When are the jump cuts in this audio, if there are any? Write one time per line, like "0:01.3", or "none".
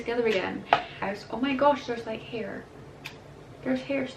0:01.0